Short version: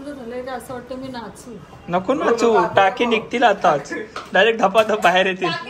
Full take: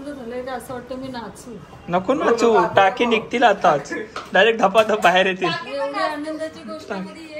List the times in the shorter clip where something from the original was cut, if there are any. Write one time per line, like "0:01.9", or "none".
none